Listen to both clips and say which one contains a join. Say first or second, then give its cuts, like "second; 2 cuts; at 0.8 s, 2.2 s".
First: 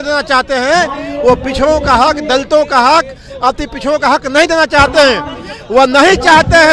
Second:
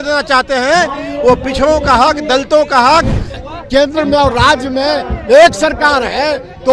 second; 1 cut; at 3.2 s